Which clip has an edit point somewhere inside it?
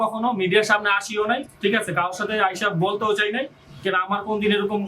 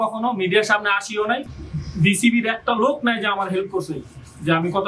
second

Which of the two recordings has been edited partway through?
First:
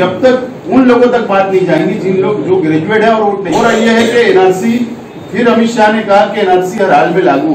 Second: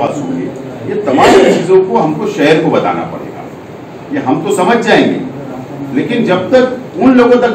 first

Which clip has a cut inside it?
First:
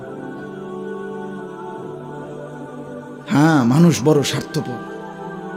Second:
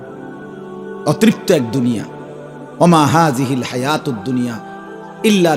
second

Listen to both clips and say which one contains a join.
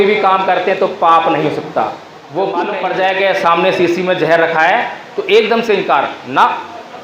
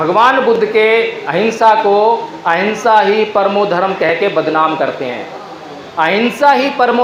first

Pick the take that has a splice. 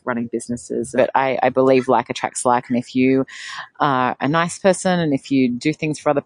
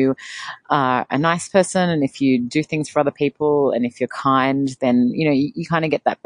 first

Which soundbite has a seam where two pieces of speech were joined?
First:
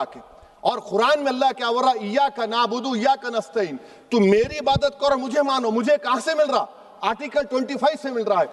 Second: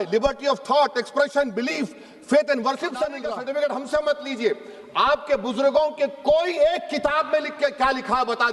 second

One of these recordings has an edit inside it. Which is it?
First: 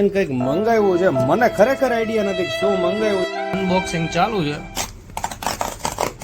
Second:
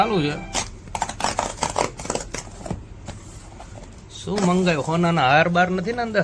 first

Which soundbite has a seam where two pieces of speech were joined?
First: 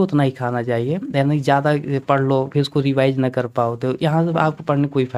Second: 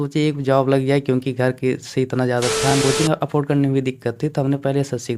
second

